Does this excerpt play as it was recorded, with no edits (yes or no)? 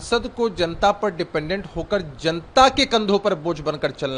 yes